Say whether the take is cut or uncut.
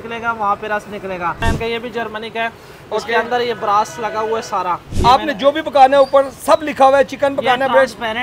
cut